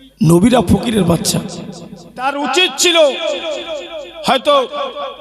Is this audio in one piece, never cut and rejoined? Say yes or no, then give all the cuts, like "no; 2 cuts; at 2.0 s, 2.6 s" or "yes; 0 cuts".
no; 1 cut; at 2.2 s